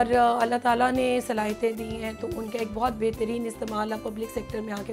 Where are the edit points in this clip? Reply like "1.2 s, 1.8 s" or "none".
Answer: none